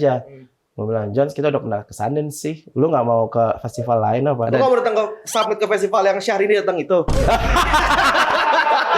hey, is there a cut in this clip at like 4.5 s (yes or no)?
yes